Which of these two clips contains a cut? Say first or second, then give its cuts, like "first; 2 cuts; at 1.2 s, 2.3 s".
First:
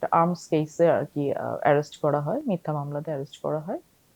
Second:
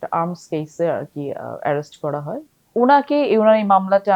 second; 1 cut; at 2.4 s